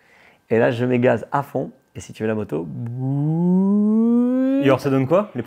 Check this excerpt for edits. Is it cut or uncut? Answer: uncut